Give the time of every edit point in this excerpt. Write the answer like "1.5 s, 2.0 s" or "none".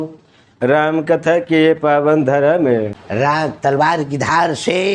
3.0 s